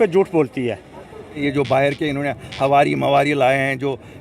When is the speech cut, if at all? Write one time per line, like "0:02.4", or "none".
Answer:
0:01.4